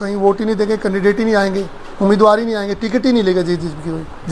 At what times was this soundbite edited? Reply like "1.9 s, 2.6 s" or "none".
none